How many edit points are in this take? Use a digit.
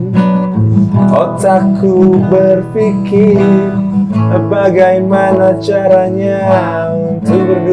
0